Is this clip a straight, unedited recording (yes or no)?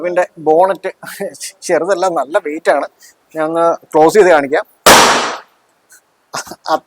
yes